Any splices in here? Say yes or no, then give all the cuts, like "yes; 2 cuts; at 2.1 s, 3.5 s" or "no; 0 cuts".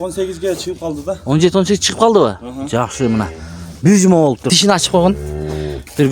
yes; 1 cut; at 4.5 s